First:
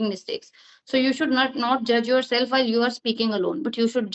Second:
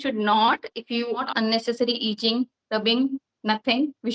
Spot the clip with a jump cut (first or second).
second